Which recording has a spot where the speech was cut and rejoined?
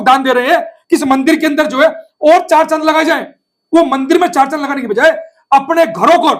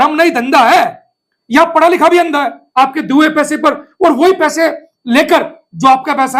second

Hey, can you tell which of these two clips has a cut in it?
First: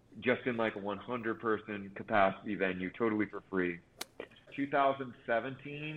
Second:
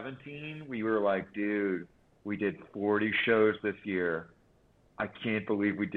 first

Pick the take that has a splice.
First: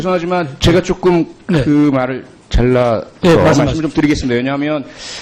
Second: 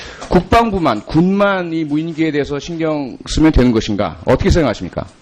second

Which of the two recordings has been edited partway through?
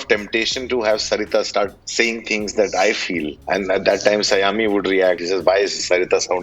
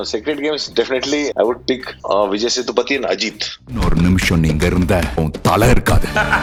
first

